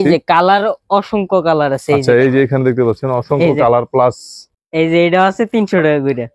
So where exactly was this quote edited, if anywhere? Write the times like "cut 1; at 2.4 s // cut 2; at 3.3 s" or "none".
none